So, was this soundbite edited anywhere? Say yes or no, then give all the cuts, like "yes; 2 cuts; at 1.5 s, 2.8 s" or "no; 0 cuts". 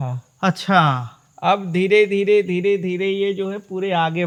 no; 0 cuts